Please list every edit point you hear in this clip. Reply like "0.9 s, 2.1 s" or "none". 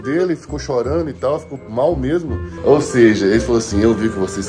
2.5 s